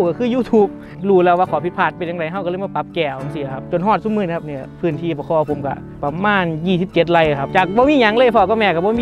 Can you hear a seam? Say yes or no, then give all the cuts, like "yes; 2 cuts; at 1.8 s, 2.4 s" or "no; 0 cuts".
yes; 4 cuts; at 0.9 s, 3.6 s, 6.0 s, 7.5 s